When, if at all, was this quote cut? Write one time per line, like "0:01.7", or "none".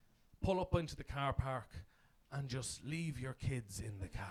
none